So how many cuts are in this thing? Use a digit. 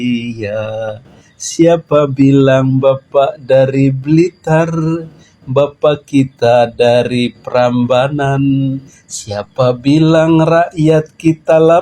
1